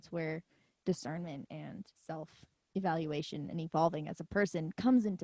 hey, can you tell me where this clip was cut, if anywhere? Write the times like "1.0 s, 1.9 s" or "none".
1.9 s